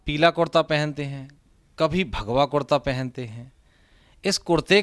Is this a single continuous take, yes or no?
yes